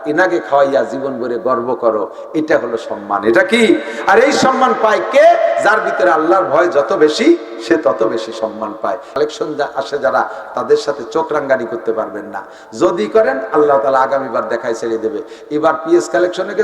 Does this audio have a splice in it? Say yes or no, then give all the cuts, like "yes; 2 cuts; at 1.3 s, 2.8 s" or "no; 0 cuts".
yes; 1 cut; at 9.2 s